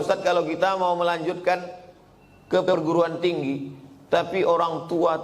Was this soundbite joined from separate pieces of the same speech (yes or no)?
no